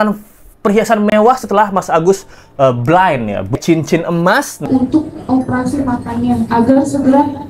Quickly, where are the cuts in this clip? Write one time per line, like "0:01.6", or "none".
0:03.6
0:04.7

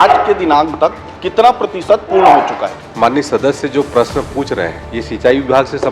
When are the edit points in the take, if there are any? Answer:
0:02.8
0:04.9

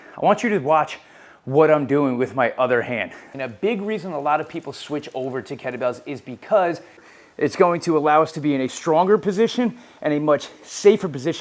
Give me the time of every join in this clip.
0:03.3
0:07.1

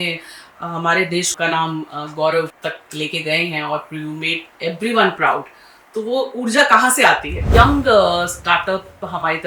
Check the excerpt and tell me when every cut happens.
0:01.3
0:02.5
0:07.4

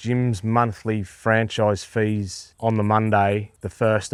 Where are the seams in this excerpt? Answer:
none

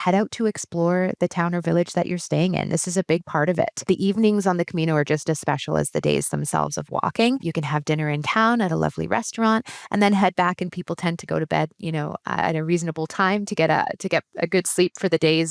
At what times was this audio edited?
0:03.8
0:07.5

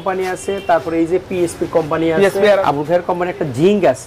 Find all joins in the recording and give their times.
0:02.6

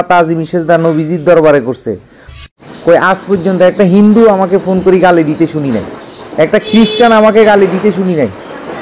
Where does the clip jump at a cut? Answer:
0:02.4

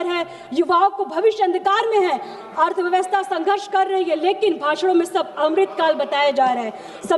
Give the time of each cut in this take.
none

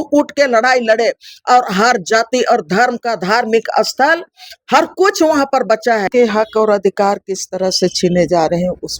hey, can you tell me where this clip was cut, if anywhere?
0:06.1

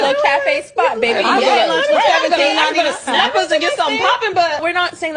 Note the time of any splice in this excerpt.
none

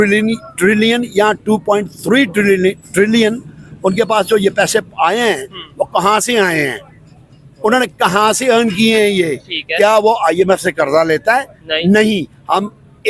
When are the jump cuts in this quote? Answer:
none

